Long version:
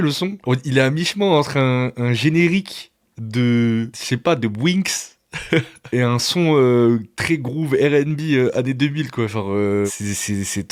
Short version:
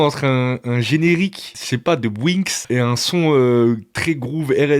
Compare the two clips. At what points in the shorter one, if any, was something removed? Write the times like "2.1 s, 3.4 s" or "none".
1.6 s, 2.6 s